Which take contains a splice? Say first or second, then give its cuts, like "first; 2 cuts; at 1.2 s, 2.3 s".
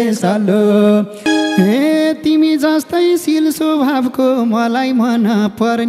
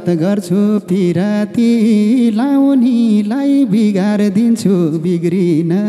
first; 1 cut; at 1.3 s